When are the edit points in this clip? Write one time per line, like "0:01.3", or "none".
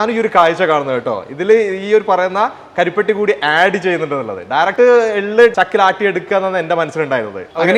none